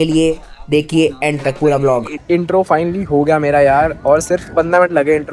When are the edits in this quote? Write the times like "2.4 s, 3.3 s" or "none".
2.1 s

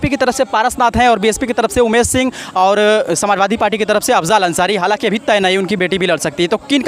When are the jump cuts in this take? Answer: none

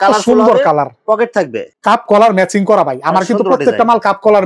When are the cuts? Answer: 1.6 s

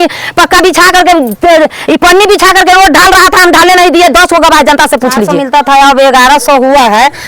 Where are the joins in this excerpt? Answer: 5.4 s

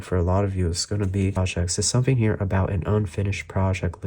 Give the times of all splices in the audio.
1.4 s

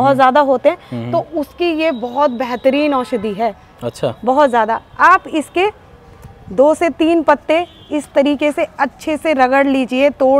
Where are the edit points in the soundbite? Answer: none

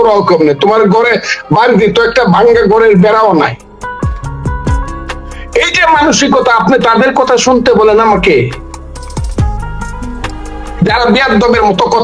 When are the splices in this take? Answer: 4.2 s, 5.4 s

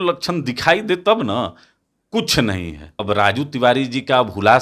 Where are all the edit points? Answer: 3.0 s

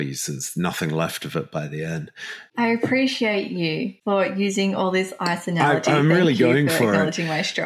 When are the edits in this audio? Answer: 2.4 s, 3.9 s

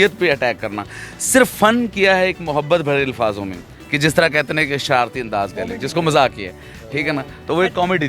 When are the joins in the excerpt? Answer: none

